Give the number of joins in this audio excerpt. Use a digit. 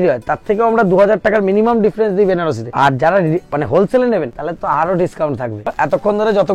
3